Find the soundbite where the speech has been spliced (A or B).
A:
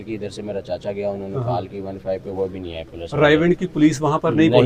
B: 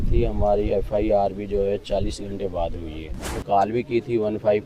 B